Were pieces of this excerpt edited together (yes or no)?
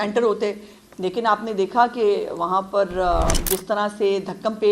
yes